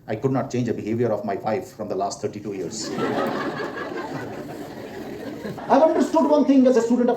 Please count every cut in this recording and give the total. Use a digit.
1